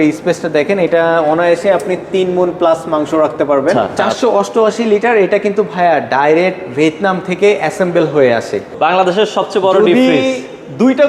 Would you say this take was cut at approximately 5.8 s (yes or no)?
no